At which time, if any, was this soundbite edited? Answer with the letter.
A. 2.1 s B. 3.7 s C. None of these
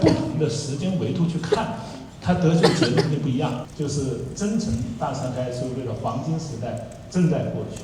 B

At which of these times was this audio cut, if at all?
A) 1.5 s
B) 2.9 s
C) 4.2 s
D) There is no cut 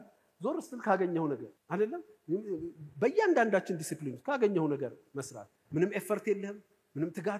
A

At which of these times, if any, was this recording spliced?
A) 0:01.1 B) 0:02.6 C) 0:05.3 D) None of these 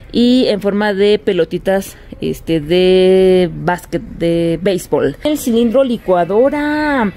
C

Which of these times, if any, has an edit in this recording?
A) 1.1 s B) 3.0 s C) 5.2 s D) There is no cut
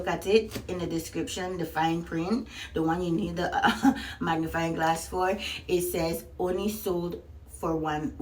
D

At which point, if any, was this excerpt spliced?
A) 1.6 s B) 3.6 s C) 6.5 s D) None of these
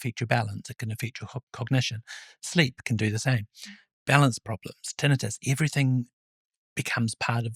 D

